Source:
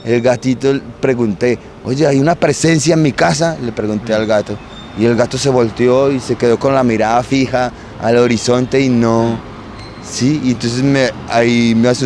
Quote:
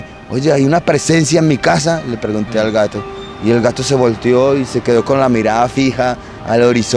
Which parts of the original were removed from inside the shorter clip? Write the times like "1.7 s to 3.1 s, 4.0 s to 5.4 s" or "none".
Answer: none